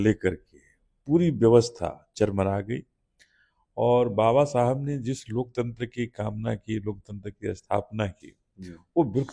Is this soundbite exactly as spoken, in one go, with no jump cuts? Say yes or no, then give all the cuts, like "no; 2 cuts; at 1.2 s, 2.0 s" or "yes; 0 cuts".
yes; 0 cuts